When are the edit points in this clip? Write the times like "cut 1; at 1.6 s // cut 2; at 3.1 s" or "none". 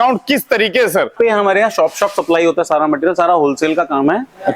cut 1; at 1.1 s